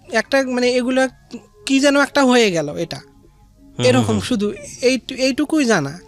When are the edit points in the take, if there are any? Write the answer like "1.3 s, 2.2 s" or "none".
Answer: none